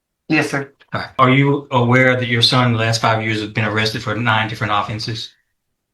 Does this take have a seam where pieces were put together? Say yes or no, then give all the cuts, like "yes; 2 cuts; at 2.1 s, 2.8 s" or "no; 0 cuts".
yes; 1 cut; at 1.1 s